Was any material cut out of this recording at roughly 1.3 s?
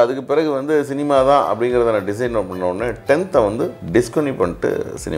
no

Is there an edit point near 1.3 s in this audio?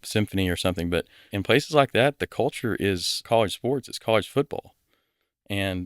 yes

